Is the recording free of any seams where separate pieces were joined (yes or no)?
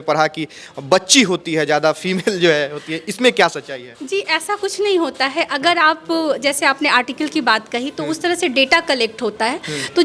yes